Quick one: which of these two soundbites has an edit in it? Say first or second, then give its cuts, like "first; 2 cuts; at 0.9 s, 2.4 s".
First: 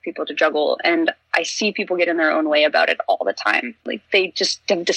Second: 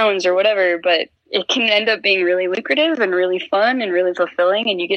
second; 1 cut; at 1.2 s